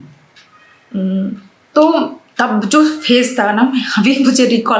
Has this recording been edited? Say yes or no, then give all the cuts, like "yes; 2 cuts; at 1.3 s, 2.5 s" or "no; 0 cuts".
no; 0 cuts